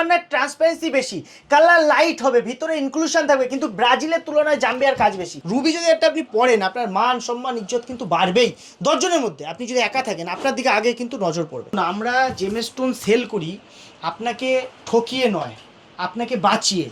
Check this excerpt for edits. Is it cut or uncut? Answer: cut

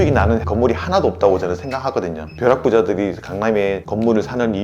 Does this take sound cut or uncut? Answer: cut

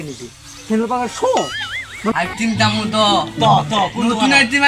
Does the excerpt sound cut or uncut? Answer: cut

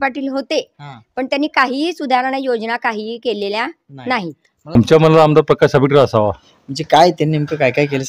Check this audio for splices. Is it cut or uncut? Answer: cut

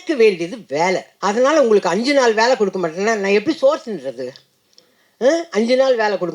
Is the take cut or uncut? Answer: cut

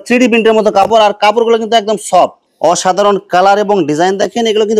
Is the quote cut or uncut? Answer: cut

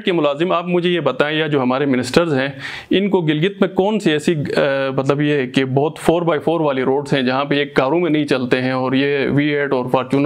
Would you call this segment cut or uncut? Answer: uncut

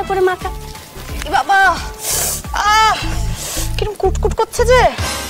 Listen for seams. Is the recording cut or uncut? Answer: uncut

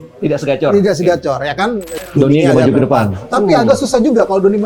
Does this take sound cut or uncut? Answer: cut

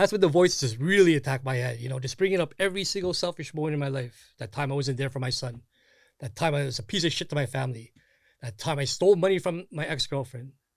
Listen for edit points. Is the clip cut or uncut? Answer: uncut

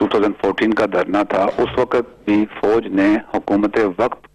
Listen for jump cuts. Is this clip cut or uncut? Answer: uncut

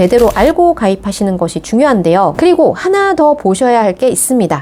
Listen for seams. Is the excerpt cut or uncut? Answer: uncut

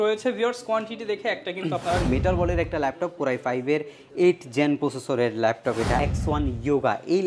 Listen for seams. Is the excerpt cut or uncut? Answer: cut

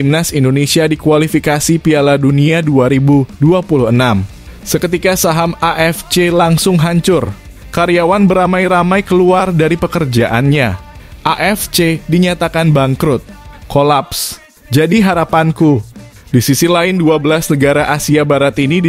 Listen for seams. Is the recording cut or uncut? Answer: uncut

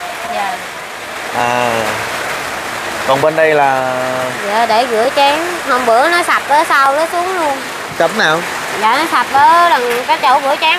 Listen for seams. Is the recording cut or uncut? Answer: uncut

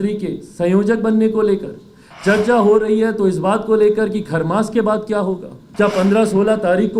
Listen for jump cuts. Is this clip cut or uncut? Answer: cut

